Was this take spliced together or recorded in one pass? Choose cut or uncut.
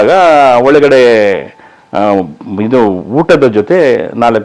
uncut